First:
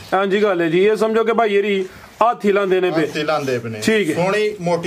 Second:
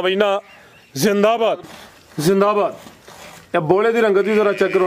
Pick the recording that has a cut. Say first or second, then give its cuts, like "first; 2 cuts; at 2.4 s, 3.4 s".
second; 1 cut; at 1.7 s